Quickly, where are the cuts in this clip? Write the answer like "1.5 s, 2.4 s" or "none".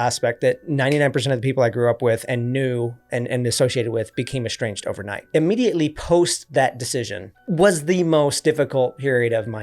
5.2 s

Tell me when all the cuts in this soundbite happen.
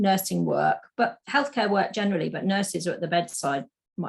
none

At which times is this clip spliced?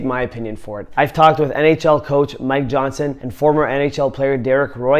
none

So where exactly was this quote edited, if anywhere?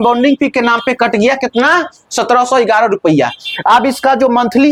none

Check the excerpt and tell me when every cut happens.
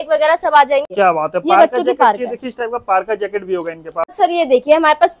0.9 s, 4.0 s

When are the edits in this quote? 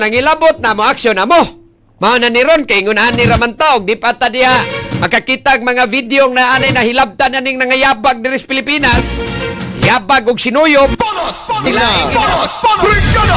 12.1 s

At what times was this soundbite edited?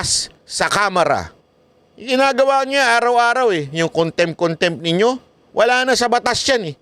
none

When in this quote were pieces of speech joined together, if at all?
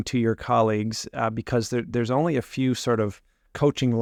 none

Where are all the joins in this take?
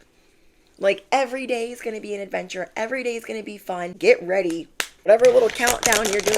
3.9 s, 5.1 s

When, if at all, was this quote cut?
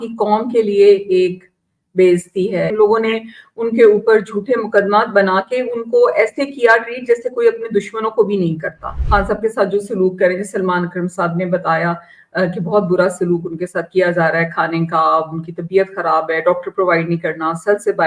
2.7 s, 8.9 s

